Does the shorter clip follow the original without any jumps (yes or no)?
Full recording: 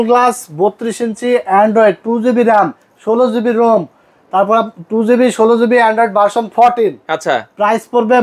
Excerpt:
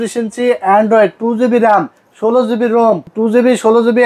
no